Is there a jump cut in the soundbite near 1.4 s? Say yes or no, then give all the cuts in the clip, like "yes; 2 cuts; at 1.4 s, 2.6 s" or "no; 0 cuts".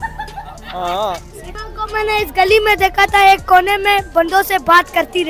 yes; 1 cut; at 1.4 s